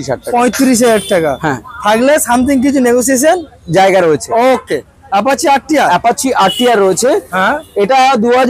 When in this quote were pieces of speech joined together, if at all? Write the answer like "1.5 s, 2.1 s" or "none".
none